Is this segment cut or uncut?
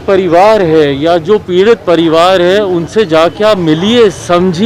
uncut